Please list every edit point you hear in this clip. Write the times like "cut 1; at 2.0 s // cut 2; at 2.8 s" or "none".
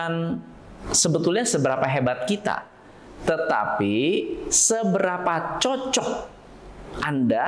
none